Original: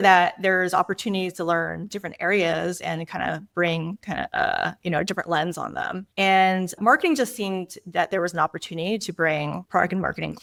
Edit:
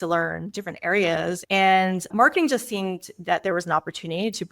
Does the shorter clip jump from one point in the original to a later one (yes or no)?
yes